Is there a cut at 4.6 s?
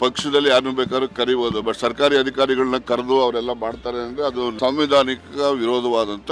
yes; 1 cut; at 4.6 s

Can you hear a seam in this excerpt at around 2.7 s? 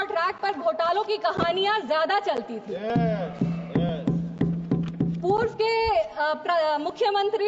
no; 0 cuts

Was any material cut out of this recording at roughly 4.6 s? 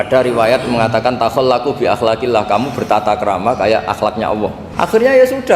yes; 1 cut; at 4.6 s

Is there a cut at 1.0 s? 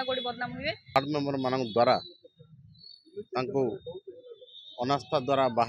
yes; 1 cut; at 1.0 s

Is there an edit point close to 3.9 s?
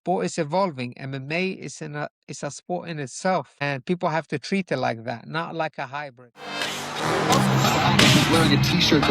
no; 1 cut; at 6.8 s

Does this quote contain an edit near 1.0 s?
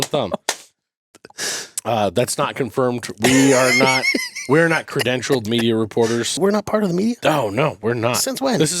no; 1 cut; at 6.3 s

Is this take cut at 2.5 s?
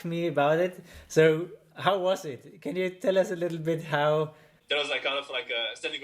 no; 1 cut; at 4.6 s

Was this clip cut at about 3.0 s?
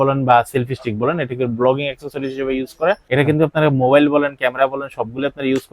yes; 1 cut; at 3.0 s

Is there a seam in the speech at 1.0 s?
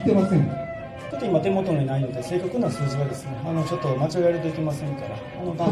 yes; 1 cut; at 1.0 s

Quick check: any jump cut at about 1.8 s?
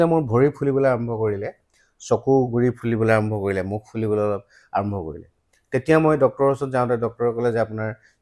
no; 0 cuts

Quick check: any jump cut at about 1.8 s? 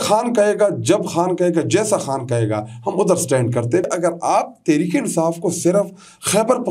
no; 1 cut; at 3.9 s

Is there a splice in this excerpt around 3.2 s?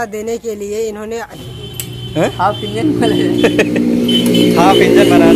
no; 1 cut; at 1.4 s

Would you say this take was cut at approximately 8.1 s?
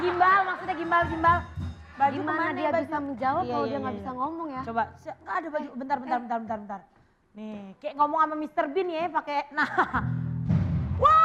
no; 0 cuts

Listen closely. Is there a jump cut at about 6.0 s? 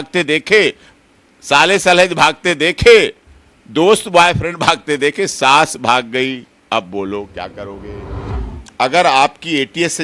no; 1 cut; at 8.2 s

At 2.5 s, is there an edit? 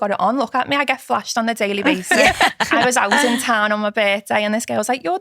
yes; 1 cut; at 2.5 s

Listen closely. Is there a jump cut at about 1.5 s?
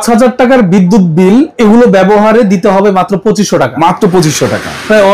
yes; 1 cut; at 1.5 s

